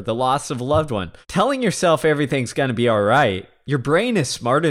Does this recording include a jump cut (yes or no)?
yes